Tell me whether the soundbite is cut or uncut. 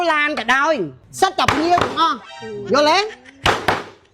cut